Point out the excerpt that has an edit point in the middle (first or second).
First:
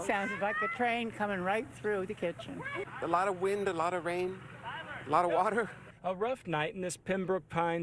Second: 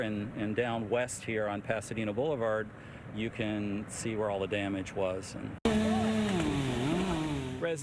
first